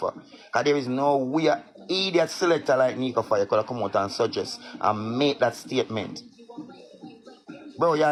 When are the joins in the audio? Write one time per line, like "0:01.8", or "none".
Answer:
none